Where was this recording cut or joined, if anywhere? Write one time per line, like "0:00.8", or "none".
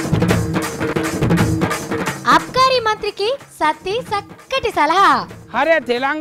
0:00.9

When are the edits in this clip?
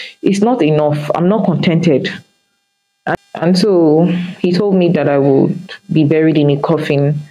0:03.1

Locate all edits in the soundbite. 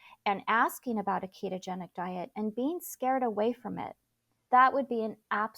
0:04.3

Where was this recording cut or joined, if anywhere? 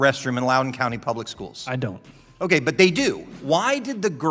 0:03.3

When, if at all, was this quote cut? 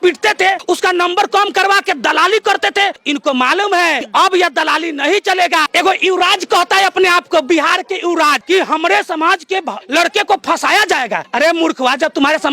0:03.0
0:04.0
0:05.7
0:08.4

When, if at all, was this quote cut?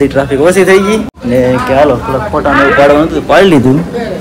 0:01.1

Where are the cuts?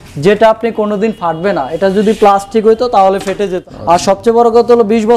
0:03.6

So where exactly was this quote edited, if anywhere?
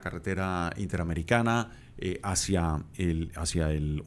0:01.8

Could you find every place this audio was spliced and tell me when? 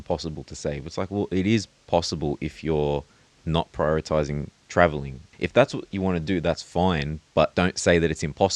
0:05.3
0:07.5

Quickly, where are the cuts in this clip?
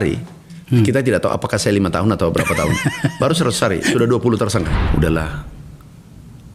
0:04.8

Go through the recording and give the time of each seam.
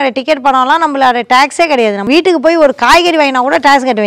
0:02.1

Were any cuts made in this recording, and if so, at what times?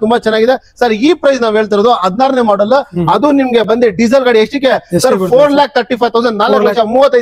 none

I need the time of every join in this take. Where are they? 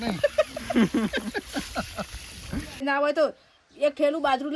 0:02.8

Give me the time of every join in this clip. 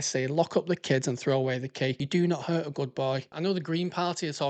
0:02.0
0:03.3

